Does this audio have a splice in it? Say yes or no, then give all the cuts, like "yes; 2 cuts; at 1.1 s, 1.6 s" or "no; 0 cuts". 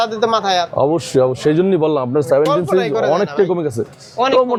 no; 0 cuts